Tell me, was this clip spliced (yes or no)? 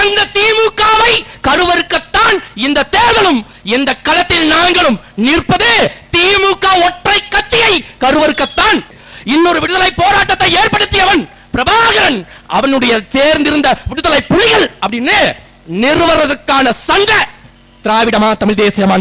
yes